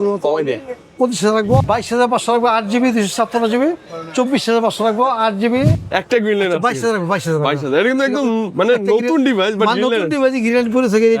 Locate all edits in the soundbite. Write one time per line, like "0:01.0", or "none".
0:01.6
0:05.9